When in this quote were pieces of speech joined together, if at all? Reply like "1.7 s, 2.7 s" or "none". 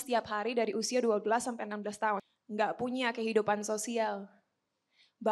2.2 s